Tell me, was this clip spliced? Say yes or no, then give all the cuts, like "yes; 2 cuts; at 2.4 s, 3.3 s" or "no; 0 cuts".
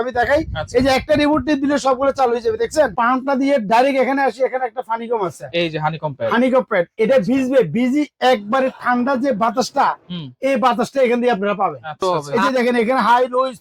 yes; 2 cuts; at 2.9 s, 12.0 s